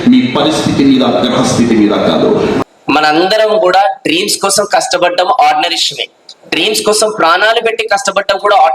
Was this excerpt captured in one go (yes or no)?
no